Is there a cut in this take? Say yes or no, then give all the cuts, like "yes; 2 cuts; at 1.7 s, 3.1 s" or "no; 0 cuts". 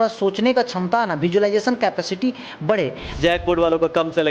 yes; 1 cut; at 3.2 s